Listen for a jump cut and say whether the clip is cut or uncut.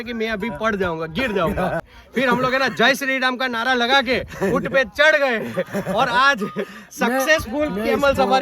cut